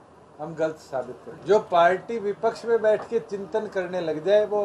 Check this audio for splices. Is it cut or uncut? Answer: cut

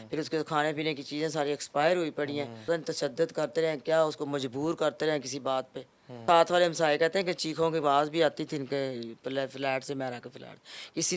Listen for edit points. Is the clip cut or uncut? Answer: cut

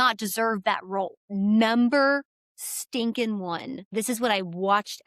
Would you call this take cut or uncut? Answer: cut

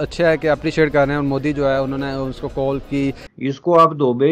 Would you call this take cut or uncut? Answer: cut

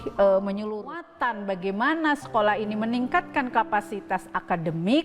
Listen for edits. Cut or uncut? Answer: cut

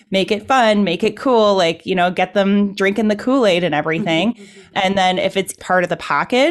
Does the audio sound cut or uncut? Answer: cut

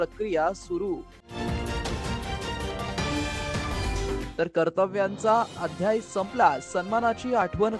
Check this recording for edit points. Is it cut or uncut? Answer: cut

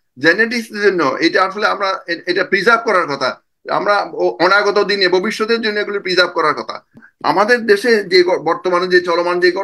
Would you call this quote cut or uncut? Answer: cut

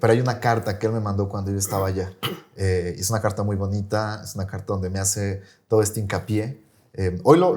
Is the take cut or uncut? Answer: uncut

